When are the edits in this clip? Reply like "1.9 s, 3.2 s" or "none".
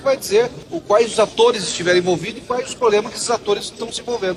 none